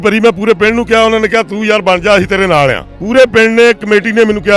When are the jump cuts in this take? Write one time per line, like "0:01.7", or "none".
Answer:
0:02.9

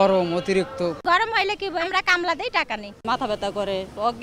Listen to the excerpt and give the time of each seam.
0:01.0
0:01.9
0:03.0

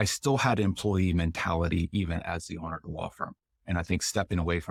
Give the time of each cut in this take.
none

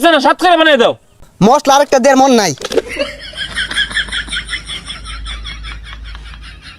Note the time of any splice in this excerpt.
0:01.2
0:03.0

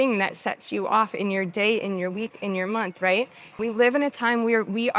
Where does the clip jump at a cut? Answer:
0:03.6

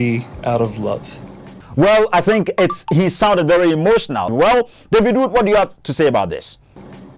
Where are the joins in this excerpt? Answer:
0:04.2

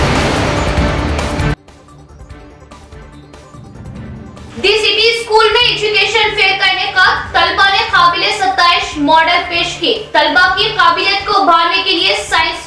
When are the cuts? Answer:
0:04.2

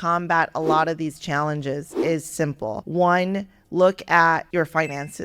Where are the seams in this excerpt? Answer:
0:02.2
0:04.5

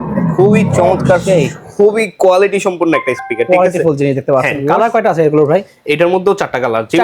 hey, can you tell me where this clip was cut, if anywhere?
0:04.7

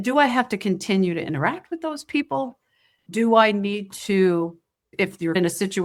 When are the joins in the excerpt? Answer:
none

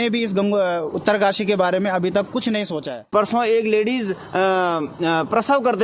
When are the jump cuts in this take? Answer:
0:03.0

